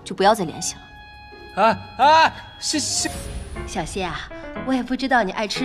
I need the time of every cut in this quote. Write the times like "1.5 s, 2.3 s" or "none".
3.4 s